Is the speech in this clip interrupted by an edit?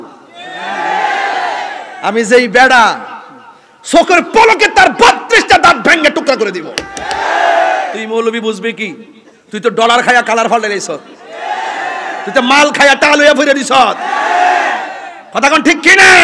yes; 1 cut; at 8.0 s

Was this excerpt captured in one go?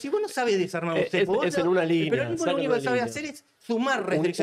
yes; 0 cuts

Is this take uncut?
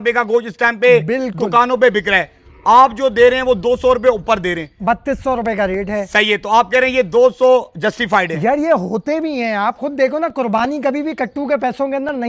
yes; 0 cuts

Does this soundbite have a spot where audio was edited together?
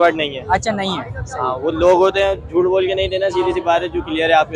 no; 0 cuts

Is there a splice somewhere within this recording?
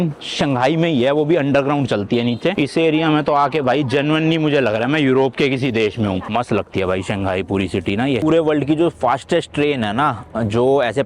yes; 3 cuts; at 2.5 s, 6.3 s, 8.2 s

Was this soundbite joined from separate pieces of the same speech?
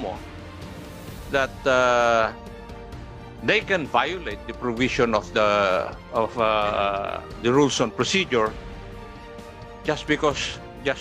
no; 0 cuts

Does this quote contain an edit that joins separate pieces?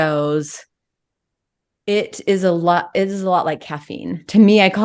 no; 0 cuts

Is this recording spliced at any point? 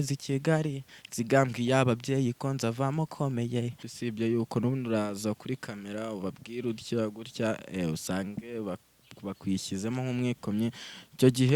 yes; 1 cut; at 3.9 s

